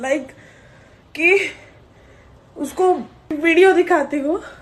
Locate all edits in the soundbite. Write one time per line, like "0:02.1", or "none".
0:03.3